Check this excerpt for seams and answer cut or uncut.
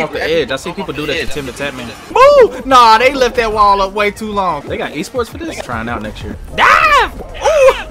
cut